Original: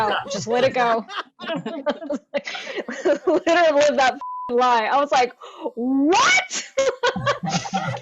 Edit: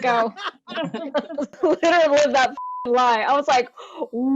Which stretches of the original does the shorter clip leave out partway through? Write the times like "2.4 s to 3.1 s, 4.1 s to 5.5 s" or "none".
2.3 s to 3.2 s